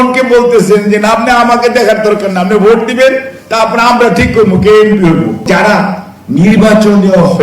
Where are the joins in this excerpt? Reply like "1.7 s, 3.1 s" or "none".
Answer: 5.5 s